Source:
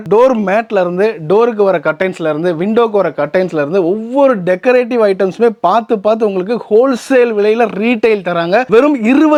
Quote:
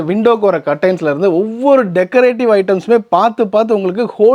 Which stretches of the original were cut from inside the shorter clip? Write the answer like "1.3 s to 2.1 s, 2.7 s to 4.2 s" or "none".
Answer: none